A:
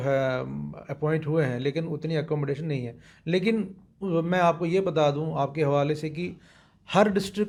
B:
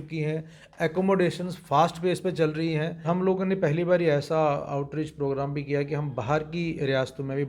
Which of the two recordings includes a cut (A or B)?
B